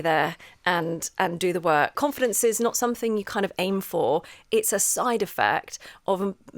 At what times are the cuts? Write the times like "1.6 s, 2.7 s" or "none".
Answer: 1.9 s